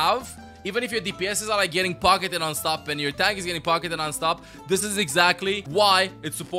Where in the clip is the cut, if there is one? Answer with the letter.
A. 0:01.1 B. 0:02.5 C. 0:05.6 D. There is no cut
C